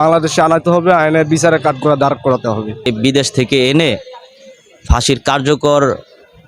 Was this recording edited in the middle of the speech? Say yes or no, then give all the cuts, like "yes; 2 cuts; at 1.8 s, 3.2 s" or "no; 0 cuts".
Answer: yes; 1 cut; at 2.9 s